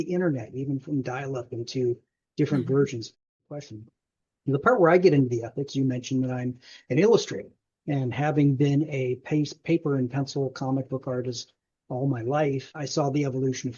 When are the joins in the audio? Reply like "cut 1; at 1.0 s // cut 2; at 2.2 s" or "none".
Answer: cut 1; at 3.2 s // cut 2; at 12.8 s